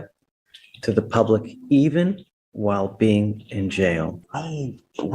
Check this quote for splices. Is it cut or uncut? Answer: cut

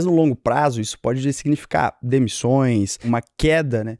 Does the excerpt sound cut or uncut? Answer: cut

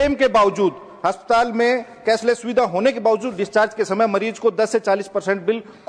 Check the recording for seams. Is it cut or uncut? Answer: uncut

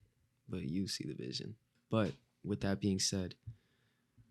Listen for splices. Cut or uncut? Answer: cut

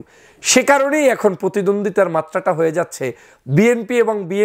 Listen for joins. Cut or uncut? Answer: uncut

